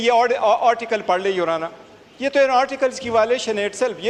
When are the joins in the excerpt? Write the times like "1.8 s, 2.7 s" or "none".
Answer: none